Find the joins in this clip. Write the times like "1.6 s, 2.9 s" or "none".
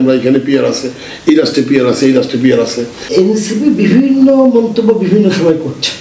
3.0 s